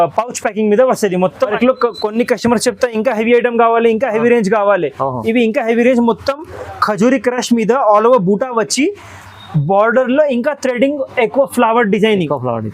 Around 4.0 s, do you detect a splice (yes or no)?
no